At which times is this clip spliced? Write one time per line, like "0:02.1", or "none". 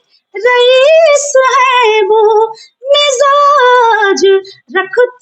none